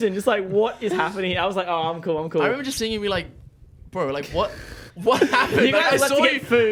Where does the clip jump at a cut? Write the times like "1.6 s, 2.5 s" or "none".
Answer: none